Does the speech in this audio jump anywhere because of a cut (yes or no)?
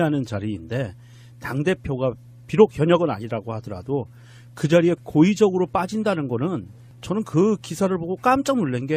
no